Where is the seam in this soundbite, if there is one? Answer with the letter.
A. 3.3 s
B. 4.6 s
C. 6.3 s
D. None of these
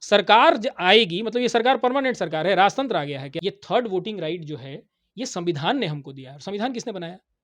A